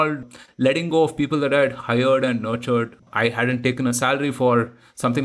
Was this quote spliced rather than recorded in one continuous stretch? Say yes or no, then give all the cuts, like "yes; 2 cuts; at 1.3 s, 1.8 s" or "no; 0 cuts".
yes; 1 cut; at 3.0 s